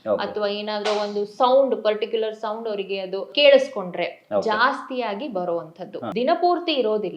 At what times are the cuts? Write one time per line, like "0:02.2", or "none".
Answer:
0:03.3
0:06.0

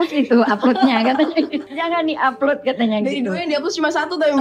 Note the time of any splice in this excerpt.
0:01.7

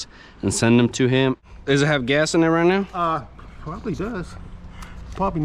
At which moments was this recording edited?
0:01.4

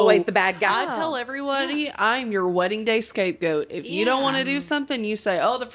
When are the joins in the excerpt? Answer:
none

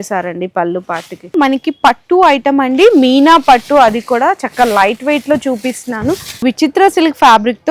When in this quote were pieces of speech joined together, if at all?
0:01.3
0:06.4

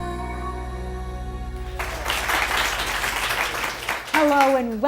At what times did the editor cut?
0:00.9

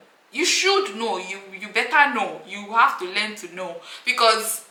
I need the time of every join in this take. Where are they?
none

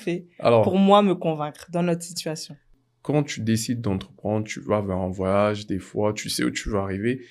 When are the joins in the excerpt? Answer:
0:02.7

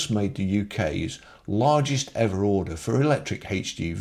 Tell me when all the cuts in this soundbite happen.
none

